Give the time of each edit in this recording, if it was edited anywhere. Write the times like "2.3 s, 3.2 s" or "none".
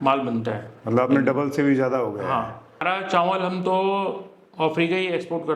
2.8 s